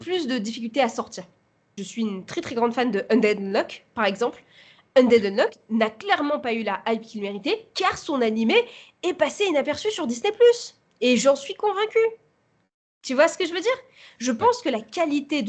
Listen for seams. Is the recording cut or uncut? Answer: cut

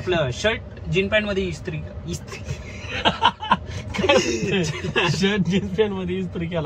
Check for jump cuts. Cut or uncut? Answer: uncut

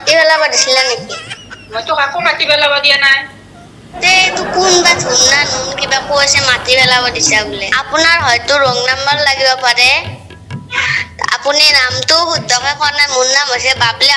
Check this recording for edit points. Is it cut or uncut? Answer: cut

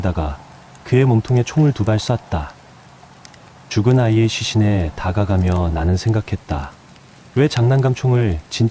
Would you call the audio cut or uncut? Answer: uncut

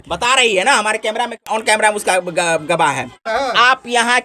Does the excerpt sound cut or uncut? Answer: cut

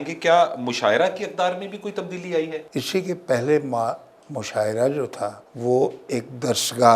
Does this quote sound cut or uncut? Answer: cut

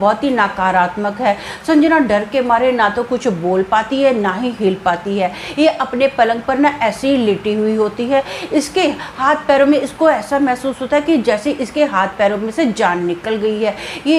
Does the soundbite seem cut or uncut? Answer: uncut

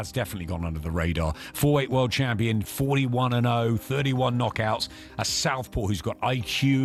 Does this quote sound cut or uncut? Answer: uncut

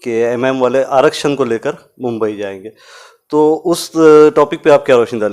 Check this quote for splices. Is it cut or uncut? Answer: uncut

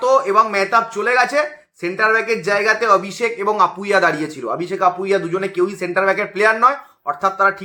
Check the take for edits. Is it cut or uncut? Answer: uncut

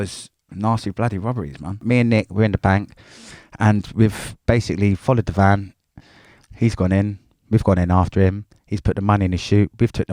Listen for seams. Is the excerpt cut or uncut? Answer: cut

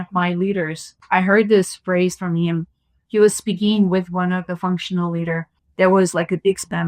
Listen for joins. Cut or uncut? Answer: cut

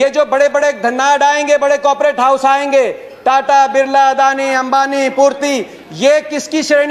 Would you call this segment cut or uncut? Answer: uncut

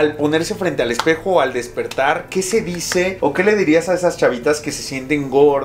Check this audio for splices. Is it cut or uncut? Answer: uncut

